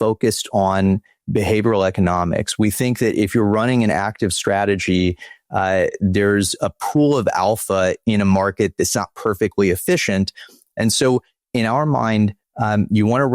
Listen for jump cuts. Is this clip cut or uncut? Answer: cut